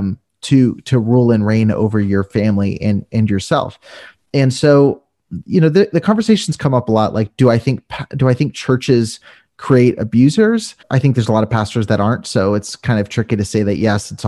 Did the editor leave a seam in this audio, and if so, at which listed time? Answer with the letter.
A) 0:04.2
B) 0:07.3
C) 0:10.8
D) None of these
C